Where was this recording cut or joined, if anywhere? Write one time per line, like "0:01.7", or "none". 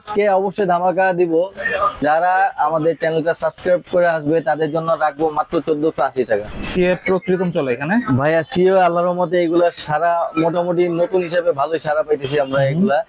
0:02.0
0:06.5